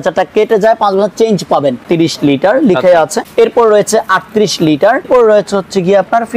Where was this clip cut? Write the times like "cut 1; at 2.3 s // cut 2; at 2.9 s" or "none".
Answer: cut 1; at 1.8 s // cut 2; at 3.2 s // cut 3; at 5.1 s